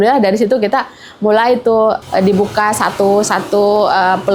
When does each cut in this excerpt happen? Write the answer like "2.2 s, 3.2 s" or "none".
2.0 s